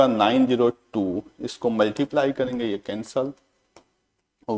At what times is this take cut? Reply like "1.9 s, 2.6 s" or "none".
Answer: none